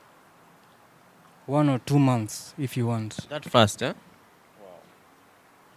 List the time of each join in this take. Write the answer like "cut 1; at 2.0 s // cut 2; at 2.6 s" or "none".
none

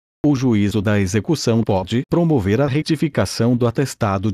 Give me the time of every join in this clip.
cut 1; at 1.2 s

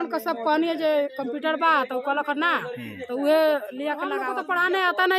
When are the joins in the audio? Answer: cut 1; at 4.2 s

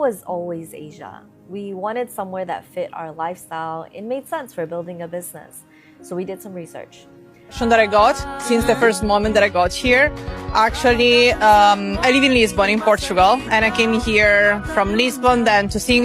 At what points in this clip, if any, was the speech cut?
cut 1; at 7.6 s

